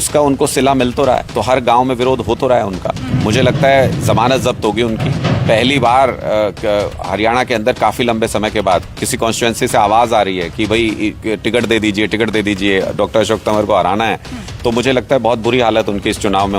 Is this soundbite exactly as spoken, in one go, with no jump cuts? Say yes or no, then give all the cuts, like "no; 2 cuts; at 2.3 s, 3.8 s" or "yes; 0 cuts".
no; 1 cut; at 1.3 s